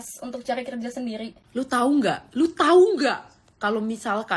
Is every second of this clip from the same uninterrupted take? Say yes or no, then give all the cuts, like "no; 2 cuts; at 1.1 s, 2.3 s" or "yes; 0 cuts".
no; 1 cut; at 1.4 s